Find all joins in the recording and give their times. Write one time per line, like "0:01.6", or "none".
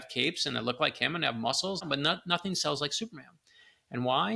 0:01.8